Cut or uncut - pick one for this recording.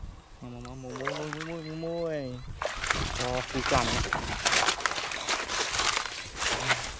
uncut